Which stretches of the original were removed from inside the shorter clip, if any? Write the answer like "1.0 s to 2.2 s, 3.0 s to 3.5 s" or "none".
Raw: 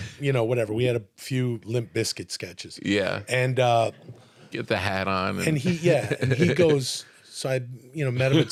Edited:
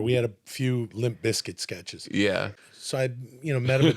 3.2 s to 7.0 s